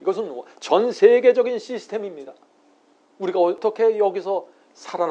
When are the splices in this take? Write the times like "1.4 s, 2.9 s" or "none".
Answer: 3.6 s